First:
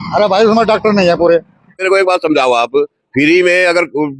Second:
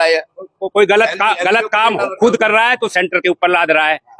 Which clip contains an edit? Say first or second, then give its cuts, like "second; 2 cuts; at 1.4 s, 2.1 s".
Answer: first; 1 cut; at 1.8 s